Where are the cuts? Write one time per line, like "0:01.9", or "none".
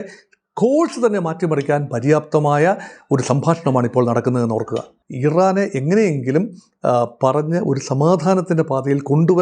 0:04.9